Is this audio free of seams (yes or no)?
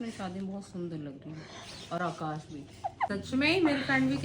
no